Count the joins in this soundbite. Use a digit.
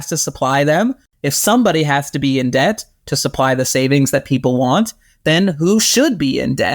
1